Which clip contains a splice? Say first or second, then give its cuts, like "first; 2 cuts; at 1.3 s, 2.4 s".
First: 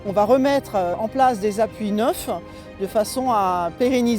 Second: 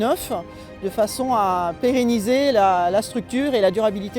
first; 1 cut; at 1.0 s